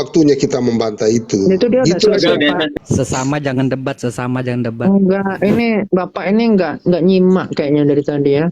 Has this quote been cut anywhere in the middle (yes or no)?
yes